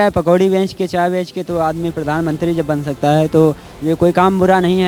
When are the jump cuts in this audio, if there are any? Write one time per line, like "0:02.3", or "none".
none